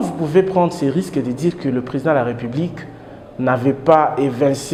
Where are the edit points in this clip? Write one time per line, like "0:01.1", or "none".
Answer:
none